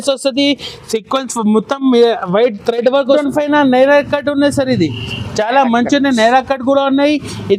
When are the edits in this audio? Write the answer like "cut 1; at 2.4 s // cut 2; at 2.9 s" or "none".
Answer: cut 1; at 3.2 s